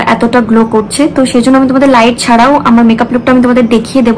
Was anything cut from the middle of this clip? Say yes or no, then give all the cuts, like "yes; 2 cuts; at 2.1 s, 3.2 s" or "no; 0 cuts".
no; 0 cuts